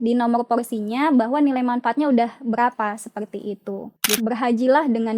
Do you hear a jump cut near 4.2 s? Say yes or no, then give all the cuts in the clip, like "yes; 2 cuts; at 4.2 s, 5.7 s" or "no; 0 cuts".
yes; 1 cut; at 4.2 s